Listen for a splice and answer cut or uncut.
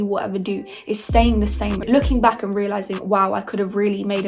cut